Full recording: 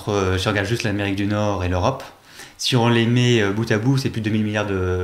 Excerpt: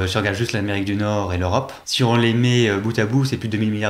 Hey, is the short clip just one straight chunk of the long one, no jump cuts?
no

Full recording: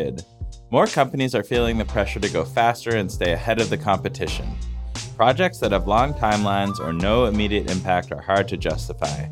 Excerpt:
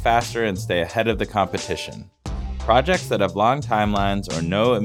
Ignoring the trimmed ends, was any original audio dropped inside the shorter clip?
no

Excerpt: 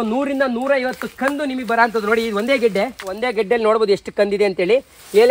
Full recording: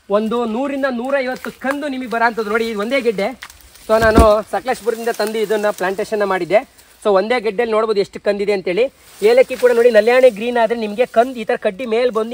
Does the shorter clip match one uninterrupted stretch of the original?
no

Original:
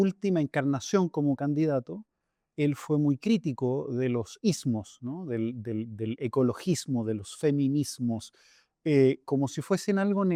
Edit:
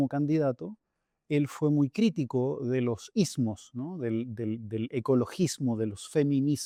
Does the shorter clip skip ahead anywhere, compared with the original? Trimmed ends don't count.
no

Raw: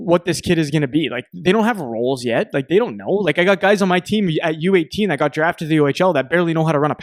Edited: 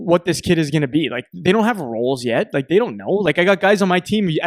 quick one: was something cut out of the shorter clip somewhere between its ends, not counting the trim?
no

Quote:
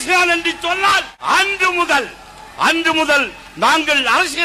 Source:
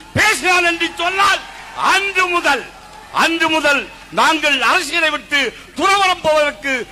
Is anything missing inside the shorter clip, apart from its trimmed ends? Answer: yes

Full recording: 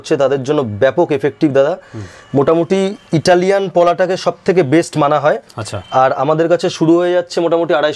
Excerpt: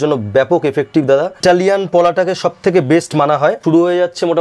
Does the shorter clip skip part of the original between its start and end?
yes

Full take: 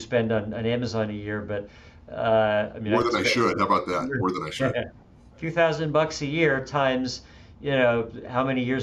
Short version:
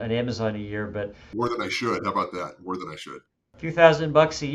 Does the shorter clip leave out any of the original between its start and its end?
yes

